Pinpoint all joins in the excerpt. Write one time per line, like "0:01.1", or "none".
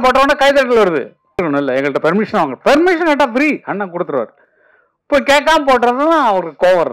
0:01.4